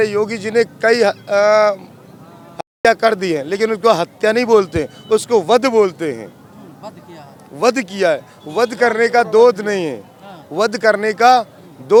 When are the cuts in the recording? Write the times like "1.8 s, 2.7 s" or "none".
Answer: none